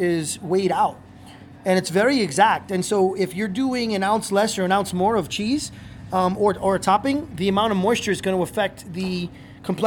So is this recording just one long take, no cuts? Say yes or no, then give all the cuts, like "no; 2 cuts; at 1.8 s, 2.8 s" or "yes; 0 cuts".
yes; 0 cuts